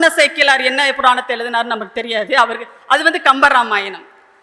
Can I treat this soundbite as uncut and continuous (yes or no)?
yes